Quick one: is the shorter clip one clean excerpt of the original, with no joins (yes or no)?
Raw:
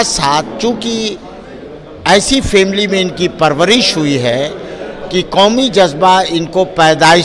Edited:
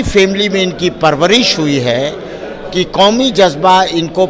yes